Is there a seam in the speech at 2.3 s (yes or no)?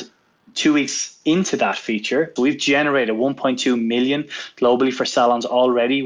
yes